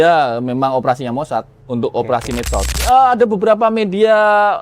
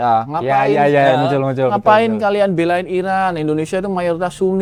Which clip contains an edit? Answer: first; 1 cut; at 2.7 s

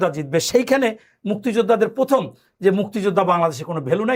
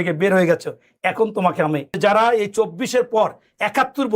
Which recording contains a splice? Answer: second; 1 cut; at 2.0 s

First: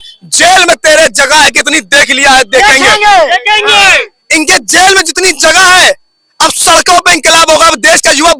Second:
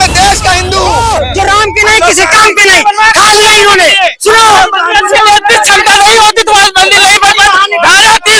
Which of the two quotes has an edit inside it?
second; 1 cut; at 0.9 s

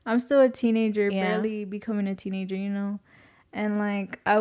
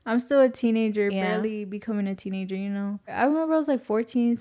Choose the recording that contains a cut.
second; 1 cut; at 3.1 s

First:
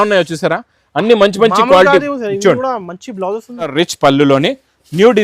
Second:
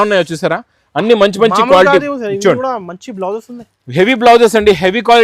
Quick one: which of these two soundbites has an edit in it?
first; 1 cut; at 3.7 s

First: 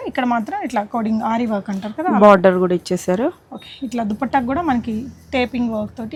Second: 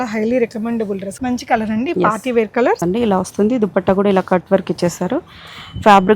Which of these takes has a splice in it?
second; 2 cuts; at 1.1 s, 2.8 s

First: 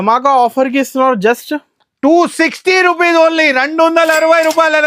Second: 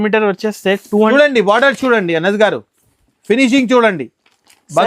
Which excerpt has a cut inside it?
second; 1 cut; at 1.1 s

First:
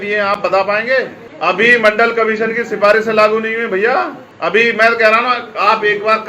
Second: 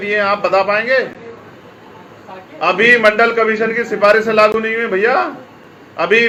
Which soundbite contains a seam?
first; 2 cuts; at 1.2 s, 4.2 s

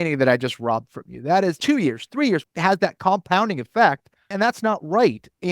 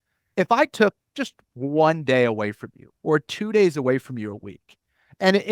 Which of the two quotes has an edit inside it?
first; 3 cuts; at 1.6 s, 2.4 s, 4.3 s

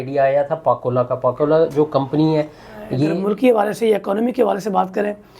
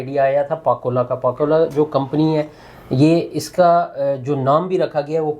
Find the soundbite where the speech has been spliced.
first; 1 cut; at 3.0 s

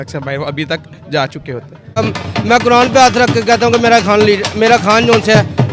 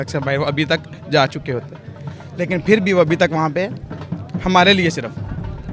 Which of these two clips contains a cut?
first; 1 cut; at 2.0 s

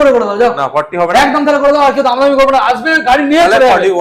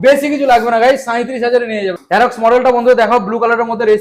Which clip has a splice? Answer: second; 1 cut; at 2.0 s

